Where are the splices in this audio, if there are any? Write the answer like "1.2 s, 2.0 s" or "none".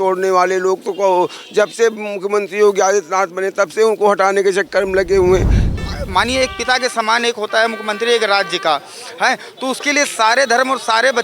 5.7 s